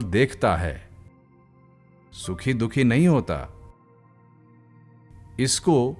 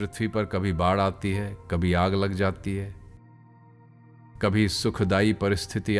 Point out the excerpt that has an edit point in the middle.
first; 2 cuts; at 3.5 s, 5.2 s

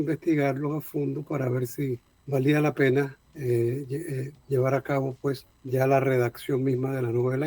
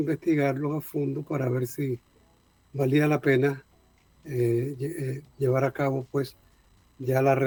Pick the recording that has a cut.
first; 3 cuts; at 2.1 s, 3.3 s, 5.5 s

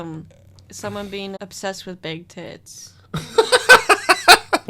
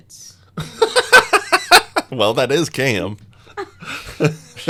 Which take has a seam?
first; 1 cut; at 1.4 s

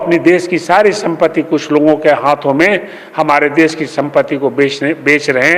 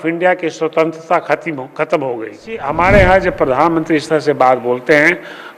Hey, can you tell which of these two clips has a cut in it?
second; 1 cut; at 2.7 s

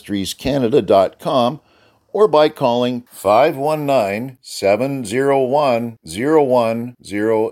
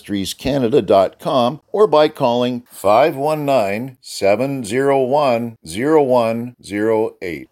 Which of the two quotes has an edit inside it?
second; 1 cut; at 1.6 s

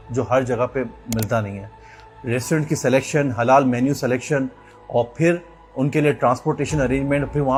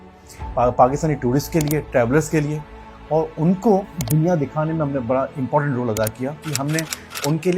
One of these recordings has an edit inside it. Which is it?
second; 2 cuts; at 4.0 s, 6.5 s

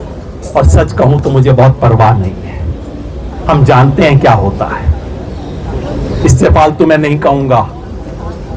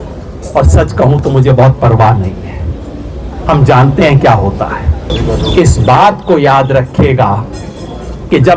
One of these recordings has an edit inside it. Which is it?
second; 1 cut; at 5.1 s

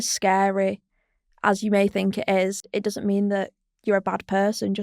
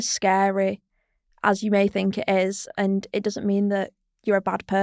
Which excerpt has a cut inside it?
first; 1 cut; at 2.7 s

